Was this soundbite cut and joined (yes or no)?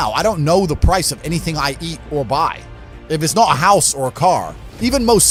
no